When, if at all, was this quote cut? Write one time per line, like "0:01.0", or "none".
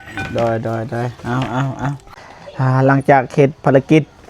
0:02.2